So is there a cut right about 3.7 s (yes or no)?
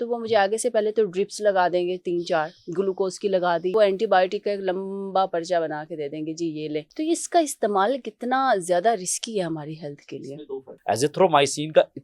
yes